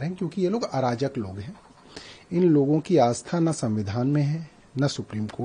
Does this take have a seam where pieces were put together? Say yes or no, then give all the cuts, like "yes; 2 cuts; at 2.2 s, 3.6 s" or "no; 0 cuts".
no; 0 cuts